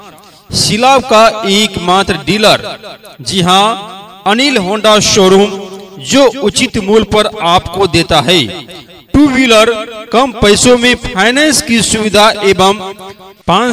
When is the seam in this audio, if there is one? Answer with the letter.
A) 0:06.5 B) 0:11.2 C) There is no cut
C